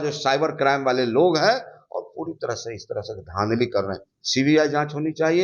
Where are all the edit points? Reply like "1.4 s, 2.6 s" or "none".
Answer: none